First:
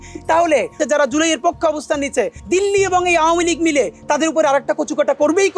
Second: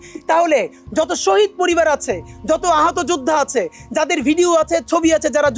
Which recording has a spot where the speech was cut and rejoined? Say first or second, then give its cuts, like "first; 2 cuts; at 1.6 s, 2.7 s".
first; 2 cuts; at 0.8 s, 2.4 s